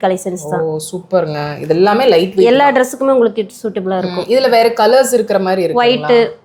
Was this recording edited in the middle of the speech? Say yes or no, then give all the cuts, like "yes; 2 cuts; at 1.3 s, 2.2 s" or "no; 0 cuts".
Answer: no; 0 cuts